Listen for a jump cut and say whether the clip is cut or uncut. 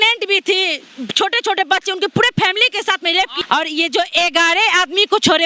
cut